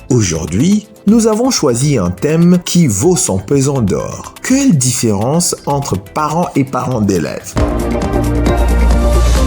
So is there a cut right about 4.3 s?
no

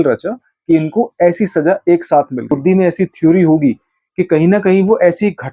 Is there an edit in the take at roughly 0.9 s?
no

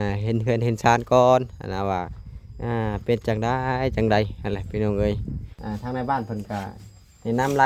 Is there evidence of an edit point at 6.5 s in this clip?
no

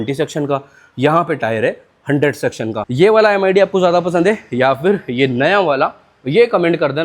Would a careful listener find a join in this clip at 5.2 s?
no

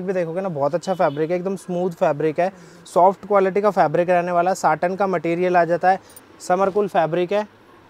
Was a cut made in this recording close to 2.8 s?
no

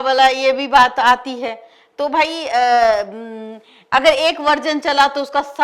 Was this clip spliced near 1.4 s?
no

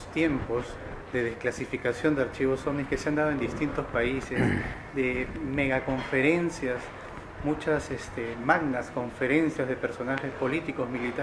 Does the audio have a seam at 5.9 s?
yes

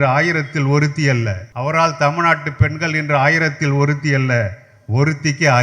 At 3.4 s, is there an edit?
no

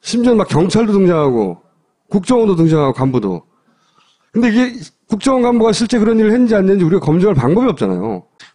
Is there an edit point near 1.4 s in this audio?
no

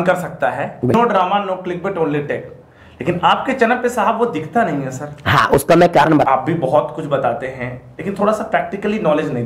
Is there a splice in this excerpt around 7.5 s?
no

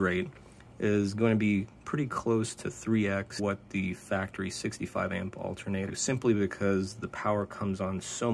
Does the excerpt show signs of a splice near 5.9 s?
yes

